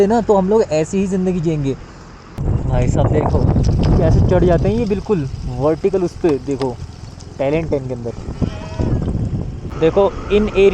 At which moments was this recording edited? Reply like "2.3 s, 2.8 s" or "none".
2.3 s, 9.7 s